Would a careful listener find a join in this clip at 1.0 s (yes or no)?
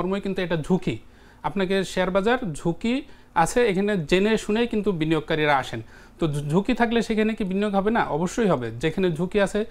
no